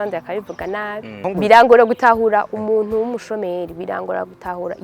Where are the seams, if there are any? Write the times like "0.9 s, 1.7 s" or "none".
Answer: 1.2 s

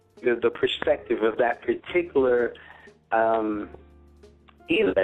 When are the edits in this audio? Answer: none

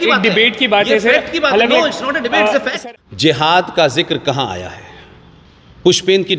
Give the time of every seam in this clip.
2.7 s

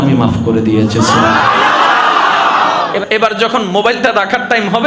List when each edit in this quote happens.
3.0 s

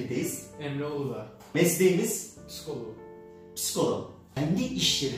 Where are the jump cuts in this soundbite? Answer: 1.5 s, 4.2 s

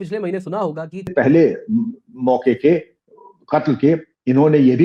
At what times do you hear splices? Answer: 1.1 s

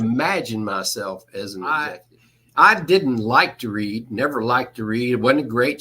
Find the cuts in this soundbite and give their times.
1.8 s

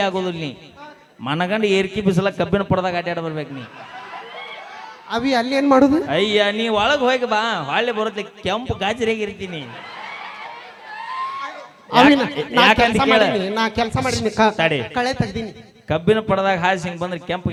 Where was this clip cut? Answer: none

